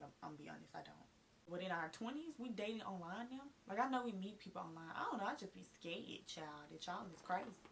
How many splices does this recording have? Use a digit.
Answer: 1